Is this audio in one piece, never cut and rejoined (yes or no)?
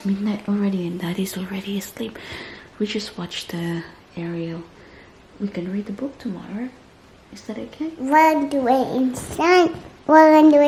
yes